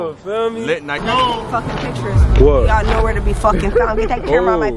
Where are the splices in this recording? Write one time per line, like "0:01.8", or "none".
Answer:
0:01.0

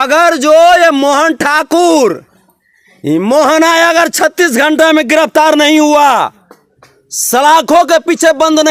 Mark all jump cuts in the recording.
none

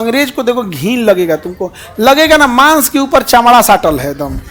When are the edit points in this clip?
none

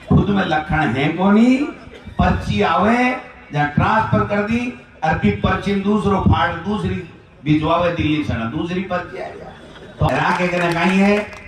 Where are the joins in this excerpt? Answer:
0:10.0

